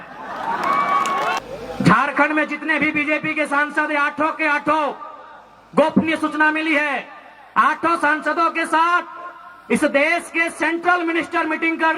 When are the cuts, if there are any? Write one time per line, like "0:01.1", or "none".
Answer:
0:01.4